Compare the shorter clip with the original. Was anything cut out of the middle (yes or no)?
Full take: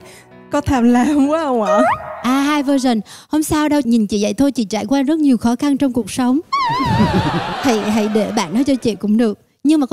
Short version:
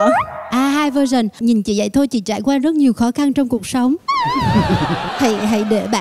yes